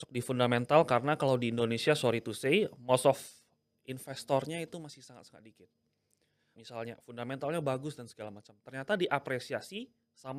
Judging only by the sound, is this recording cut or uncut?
cut